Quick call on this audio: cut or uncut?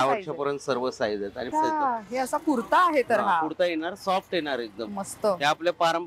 cut